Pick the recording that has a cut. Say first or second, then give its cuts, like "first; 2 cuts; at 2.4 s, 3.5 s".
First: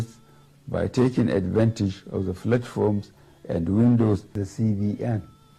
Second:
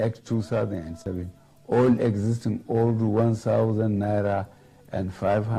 first; 1 cut; at 4.5 s